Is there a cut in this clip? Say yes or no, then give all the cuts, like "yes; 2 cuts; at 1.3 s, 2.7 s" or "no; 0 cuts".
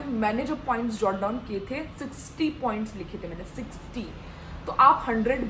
no; 0 cuts